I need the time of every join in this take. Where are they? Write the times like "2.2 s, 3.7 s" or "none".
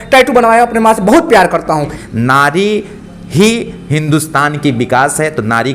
1.9 s